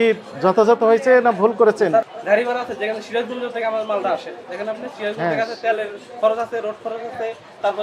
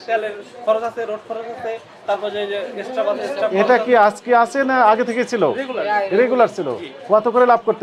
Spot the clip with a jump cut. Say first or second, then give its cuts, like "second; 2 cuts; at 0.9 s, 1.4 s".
first; 1 cut; at 2.0 s